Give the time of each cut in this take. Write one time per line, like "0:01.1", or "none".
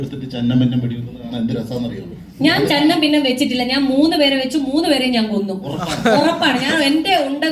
none

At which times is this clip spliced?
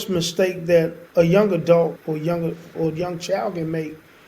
0:01.0
0:02.0

